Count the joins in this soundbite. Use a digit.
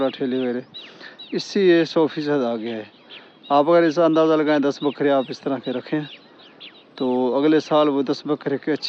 0